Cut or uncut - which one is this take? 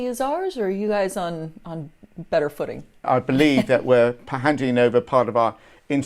cut